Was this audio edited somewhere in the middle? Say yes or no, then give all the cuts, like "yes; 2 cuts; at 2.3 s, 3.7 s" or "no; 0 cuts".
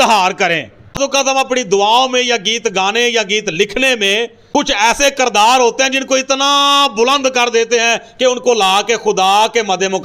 yes; 1 cut; at 1.0 s